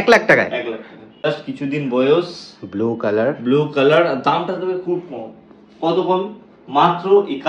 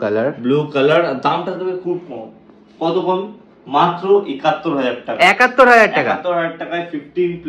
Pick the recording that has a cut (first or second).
first